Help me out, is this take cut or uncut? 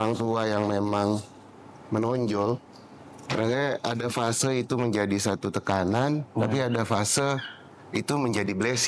uncut